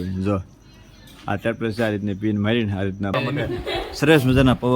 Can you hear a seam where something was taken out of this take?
yes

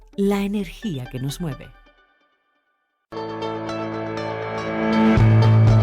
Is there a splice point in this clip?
yes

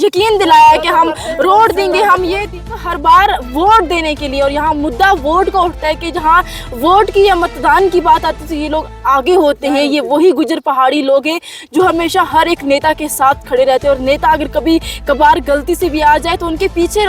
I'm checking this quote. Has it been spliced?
yes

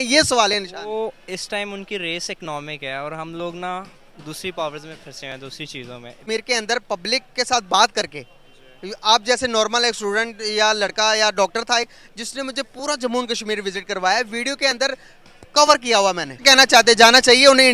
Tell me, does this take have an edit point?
yes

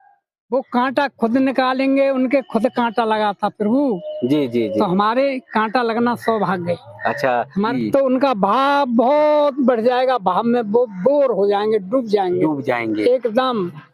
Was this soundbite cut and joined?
yes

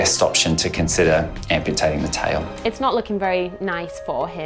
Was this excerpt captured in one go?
no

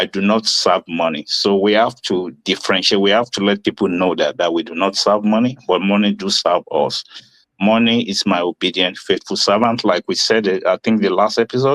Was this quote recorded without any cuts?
yes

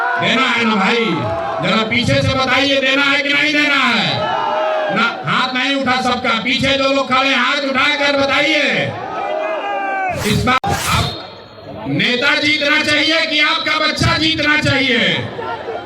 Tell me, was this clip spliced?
yes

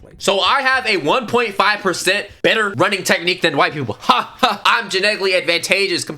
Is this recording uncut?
no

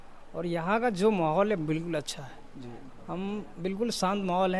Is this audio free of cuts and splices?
yes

